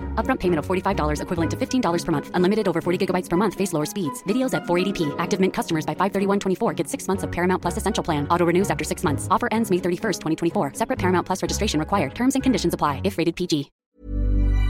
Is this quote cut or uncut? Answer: cut